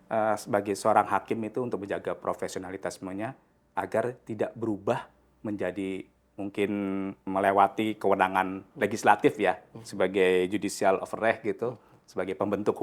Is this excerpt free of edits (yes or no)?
yes